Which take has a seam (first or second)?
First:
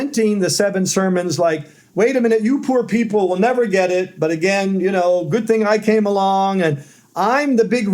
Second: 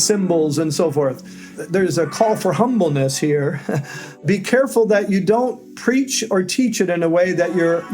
second